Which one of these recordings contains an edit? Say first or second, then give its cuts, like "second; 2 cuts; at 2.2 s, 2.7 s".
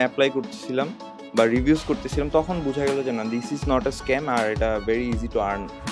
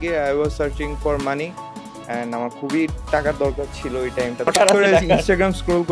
second; 1 cut; at 4.5 s